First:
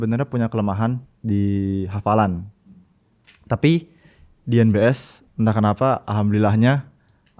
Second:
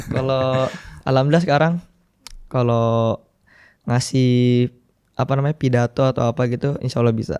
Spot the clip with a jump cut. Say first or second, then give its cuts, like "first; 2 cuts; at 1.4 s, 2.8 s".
first; 1 cut; at 1.1 s